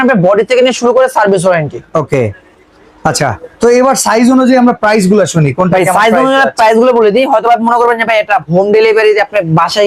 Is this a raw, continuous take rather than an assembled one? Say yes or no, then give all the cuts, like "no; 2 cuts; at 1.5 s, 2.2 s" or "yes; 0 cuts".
yes; 0 cuts